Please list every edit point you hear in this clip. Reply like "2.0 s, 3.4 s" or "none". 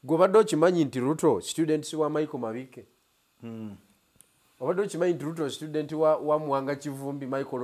none